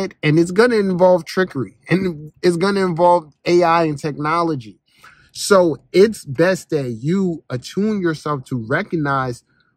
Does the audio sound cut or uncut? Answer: uncut